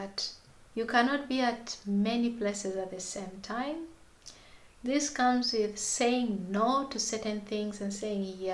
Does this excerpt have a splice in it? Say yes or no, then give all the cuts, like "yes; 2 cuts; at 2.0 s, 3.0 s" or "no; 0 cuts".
no; 0 cuts